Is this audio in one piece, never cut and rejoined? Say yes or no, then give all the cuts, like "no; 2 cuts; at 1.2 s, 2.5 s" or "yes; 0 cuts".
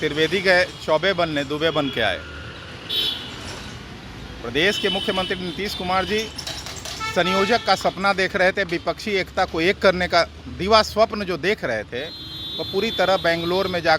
yes; 0 cuts